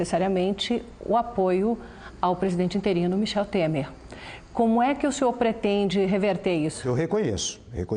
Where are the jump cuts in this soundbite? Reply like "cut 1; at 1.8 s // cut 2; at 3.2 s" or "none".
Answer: cut 1; at 6.8 s

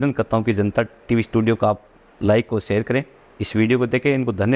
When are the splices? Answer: none

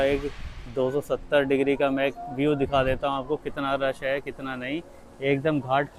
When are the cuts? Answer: none

